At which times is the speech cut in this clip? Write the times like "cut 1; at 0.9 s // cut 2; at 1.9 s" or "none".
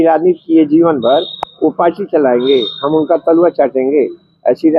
none